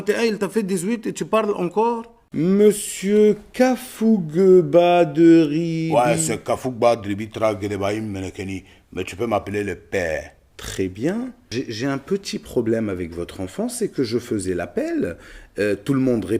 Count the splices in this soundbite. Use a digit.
0